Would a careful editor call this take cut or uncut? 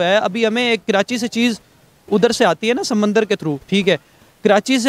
uncut